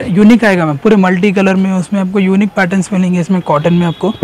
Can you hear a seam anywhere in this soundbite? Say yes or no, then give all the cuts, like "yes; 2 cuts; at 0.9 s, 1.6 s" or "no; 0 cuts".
no; 0 cuts